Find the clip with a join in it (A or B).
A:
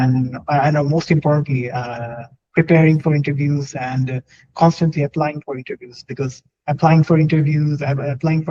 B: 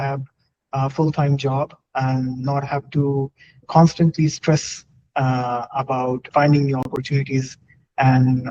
B